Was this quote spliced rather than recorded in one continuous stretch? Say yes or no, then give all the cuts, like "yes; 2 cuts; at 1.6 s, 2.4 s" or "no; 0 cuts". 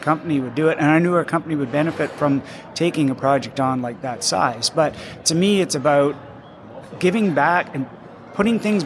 no; 0 cuts